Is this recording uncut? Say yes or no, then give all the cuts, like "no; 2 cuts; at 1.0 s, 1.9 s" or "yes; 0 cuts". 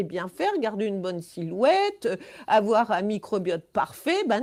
yes; 0 cuts